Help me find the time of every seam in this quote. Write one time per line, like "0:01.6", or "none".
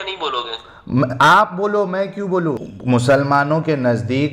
0:02.7